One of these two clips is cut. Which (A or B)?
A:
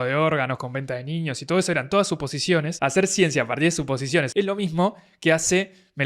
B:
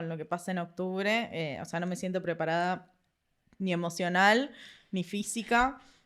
A